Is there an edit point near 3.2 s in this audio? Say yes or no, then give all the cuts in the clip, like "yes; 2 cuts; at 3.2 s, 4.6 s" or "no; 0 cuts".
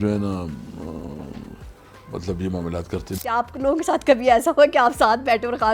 yes; 1 cut; at 3.2 s